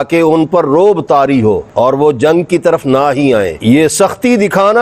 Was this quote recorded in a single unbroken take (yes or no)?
yes